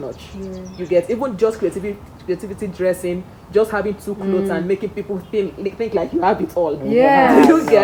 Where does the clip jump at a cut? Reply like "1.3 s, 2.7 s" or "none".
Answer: none